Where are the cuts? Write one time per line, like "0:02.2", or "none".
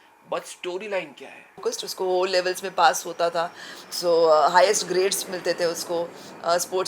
0:01.6